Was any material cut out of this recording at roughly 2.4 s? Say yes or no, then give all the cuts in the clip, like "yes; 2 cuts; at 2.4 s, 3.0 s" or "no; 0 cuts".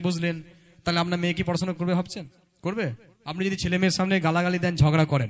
yes; 2 cuts; at 2.4 s, 3.1 s